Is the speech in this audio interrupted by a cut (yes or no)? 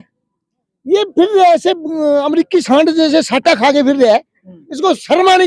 no